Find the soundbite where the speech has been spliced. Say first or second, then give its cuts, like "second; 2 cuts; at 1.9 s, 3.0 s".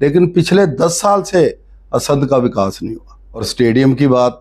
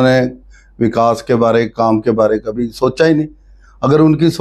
first; 1 cut; at 3.5 s